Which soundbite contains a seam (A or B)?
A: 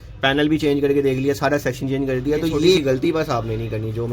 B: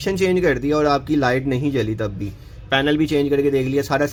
A